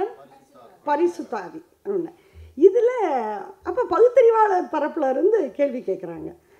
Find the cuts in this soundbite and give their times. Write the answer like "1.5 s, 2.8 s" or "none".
none